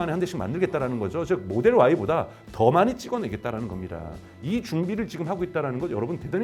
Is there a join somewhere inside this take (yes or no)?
no